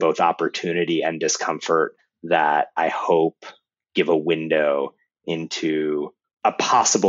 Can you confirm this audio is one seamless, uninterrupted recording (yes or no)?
no